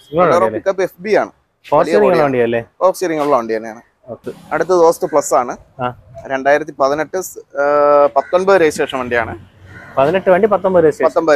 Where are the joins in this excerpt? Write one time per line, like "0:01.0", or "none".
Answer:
0:04.2